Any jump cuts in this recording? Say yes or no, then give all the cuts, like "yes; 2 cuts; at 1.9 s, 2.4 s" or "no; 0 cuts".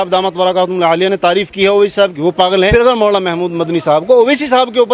yes; 1 cut; at 2.7 s